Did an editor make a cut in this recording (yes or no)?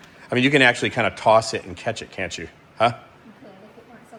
no